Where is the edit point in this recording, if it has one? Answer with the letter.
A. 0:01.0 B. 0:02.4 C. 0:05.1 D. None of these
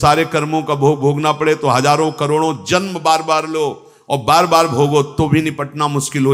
D